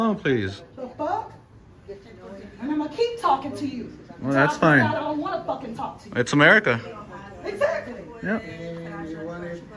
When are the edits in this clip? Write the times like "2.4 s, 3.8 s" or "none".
none